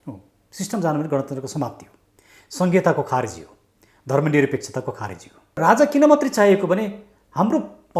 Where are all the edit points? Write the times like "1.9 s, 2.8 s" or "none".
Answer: 5.6 s